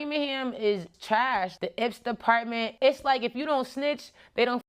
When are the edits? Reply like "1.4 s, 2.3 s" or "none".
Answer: 1.5 s